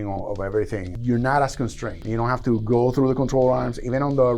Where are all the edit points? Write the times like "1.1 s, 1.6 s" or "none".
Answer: 0.9 s, 2.0 s